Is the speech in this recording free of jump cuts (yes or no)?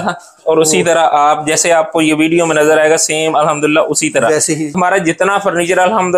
no